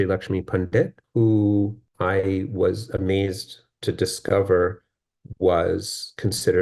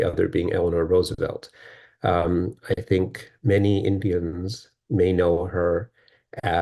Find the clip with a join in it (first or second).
first